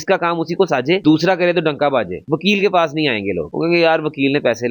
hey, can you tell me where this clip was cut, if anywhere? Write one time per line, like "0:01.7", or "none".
0:02.2